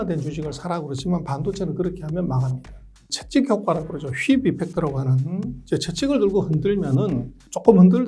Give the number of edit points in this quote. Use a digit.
1